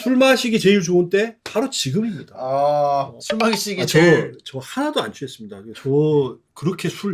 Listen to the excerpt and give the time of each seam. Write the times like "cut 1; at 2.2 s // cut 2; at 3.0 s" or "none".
cut 1; at 3.2 s // cut 2; at 5.6 s